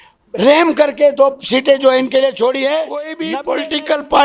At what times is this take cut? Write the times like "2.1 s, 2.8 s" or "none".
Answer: 3.2 s